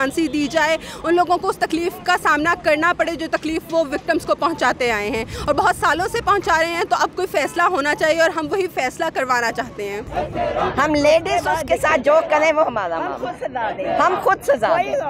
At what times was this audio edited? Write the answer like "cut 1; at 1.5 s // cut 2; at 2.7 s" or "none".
none